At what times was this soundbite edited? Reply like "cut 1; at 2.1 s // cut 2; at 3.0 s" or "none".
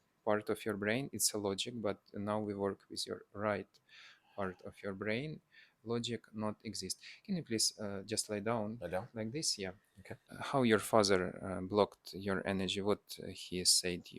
cut 1; at 10.3 s